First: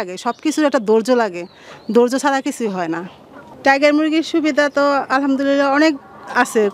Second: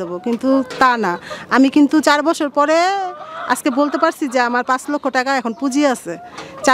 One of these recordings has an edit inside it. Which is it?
first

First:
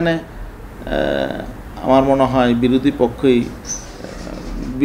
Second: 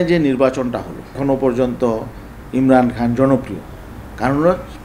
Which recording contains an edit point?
second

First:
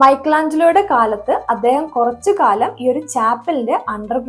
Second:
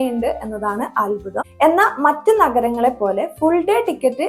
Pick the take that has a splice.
second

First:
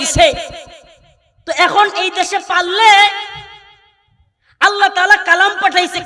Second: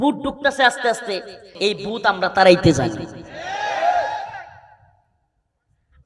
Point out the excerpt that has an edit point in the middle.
second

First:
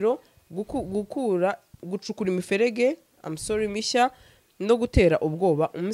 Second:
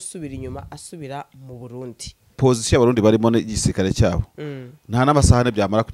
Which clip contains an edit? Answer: second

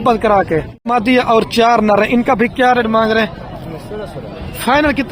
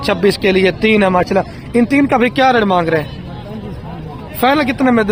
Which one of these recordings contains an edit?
first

